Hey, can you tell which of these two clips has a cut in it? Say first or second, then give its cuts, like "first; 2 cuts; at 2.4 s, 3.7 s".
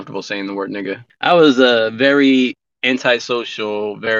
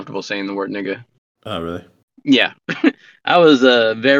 first; 1 cut; at 1.1 s